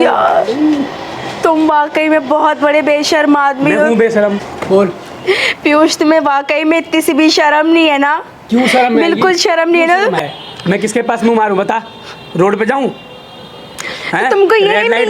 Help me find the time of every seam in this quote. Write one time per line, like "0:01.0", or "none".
0:04.5
0:10.2